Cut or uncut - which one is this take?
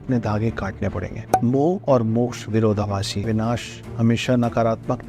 cut